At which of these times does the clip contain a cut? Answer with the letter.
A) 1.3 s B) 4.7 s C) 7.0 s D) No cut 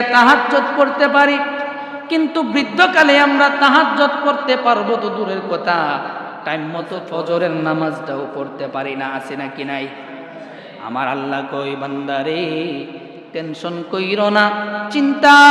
C